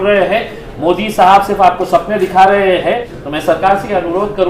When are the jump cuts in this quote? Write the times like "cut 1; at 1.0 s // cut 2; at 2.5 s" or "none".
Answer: cut 1; at 3.1 s